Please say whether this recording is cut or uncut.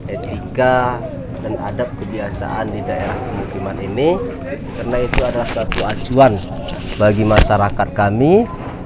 uncut